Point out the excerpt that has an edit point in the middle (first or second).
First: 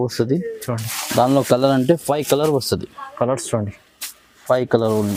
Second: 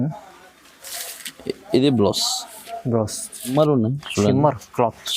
second